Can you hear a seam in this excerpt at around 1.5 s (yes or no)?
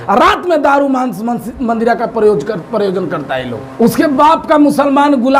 no